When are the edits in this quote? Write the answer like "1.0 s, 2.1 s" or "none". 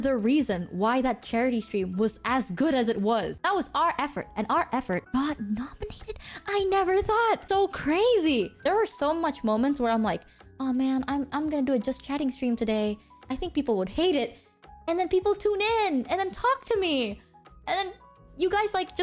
3.3 s, 5.0 s, 7.4 s, 8.5 s